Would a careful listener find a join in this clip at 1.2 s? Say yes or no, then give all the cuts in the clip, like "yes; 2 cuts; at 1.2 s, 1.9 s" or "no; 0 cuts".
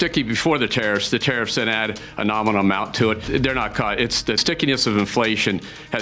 no; 2 cuts; at 3.2 s, 4.4 s